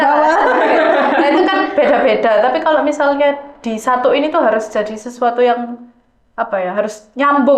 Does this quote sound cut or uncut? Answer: uncut